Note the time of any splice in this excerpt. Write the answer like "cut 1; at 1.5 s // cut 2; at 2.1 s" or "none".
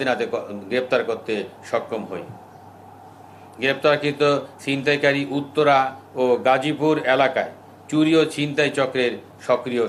none